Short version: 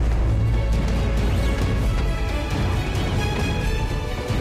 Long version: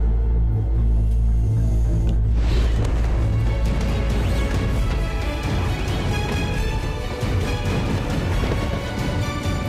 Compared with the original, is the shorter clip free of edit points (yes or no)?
yes